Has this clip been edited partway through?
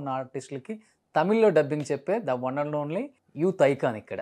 yes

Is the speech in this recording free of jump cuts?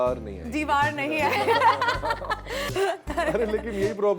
no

